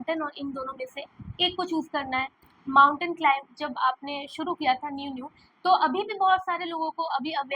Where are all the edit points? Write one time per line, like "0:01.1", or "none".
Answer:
0:02.4